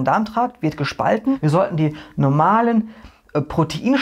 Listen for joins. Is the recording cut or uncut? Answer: cut